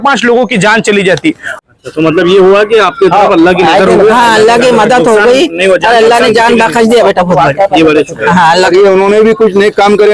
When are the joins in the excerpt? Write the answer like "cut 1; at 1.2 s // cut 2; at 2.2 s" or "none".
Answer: cut 1; at 1.5 s // cut 2; at 8.7 s